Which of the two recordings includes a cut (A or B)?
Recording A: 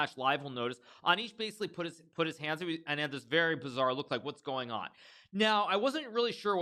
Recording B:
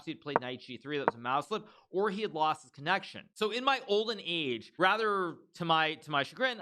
B